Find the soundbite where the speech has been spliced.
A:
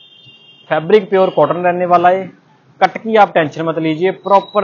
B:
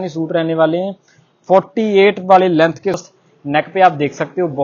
B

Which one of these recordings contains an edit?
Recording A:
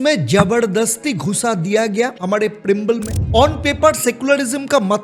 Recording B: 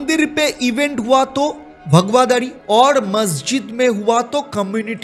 A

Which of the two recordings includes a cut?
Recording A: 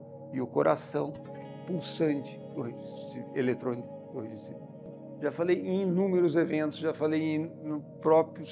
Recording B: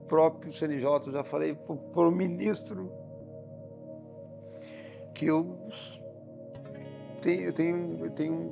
A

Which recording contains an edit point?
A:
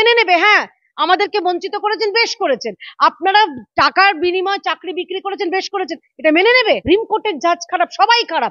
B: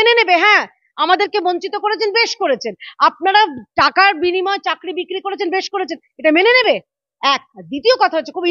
A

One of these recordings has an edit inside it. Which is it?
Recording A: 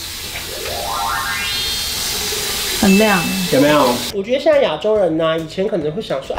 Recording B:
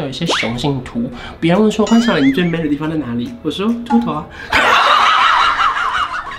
A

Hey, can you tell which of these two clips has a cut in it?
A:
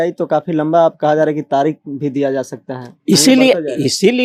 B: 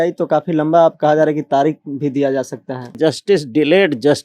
B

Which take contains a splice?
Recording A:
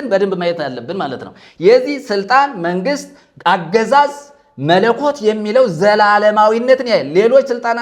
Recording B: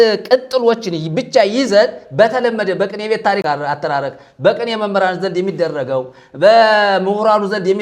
B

